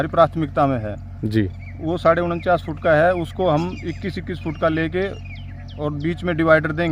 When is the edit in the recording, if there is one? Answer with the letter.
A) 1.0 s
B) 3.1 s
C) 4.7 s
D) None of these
D